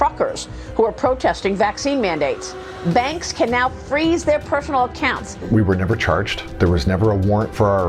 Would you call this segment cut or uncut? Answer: cut